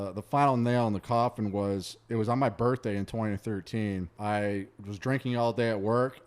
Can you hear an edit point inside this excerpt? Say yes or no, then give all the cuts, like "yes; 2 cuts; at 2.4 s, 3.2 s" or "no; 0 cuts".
yes; 1 cut; at 4.1 s